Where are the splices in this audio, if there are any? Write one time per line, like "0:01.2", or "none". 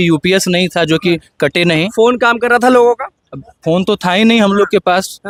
none